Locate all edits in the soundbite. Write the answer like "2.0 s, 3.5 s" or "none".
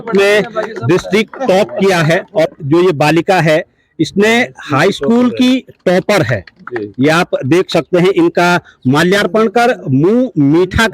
2.5 s